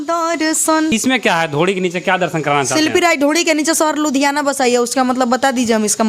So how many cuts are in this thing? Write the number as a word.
one